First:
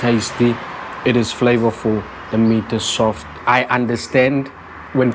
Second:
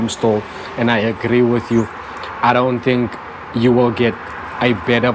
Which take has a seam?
first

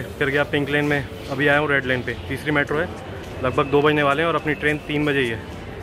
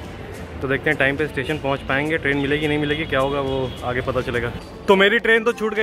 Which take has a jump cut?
second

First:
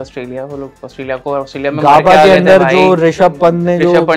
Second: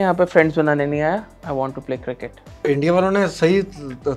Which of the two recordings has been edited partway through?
second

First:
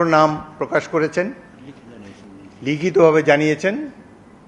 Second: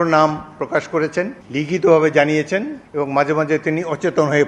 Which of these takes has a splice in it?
second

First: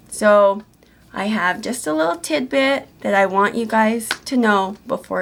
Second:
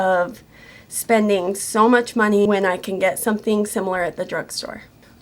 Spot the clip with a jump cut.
second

